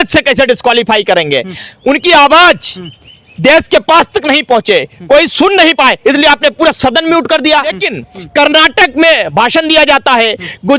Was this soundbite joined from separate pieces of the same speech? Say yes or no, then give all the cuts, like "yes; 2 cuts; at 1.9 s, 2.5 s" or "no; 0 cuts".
yes; 1 cut; at 7.9 s